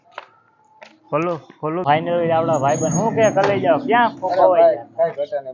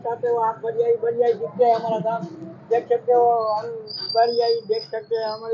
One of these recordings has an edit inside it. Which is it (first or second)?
first